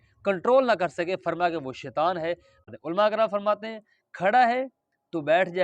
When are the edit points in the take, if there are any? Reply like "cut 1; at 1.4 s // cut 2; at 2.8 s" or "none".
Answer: cut 1; at 2.6 s

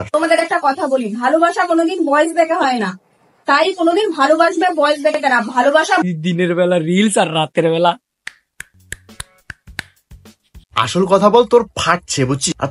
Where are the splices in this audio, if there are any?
none

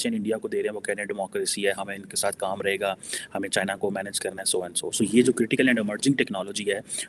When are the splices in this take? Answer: none

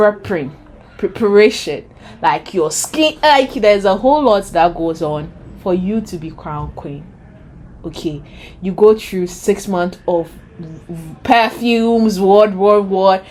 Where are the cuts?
none

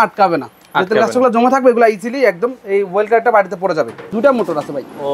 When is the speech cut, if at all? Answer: cut 1; at 4.1 s

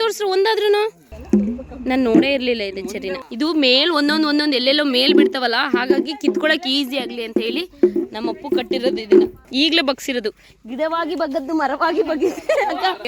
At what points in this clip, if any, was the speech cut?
cut 1; at 1.1 s // cut 2; at 3.2 s // cut 3; at 9.4 s

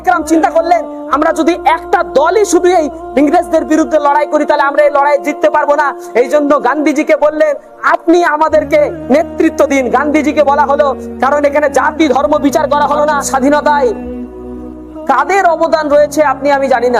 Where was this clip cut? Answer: cut 1; at 13.2 s

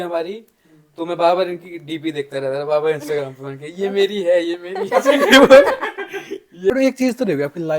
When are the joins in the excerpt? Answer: cut 1; at 6.7 s

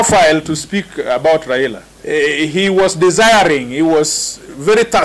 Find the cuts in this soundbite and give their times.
cut 1; at 1.9 s

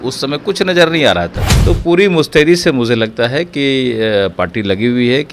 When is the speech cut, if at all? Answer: cut 1; at 1.4 s

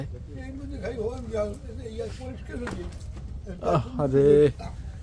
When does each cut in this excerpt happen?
none

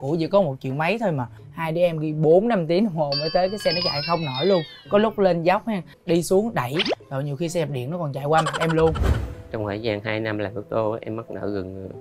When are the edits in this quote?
cut 1; at 1.3 s // cut 2; at 5.9 s // cut 3; at 9.1 s

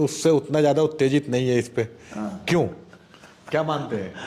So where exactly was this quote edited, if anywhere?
none

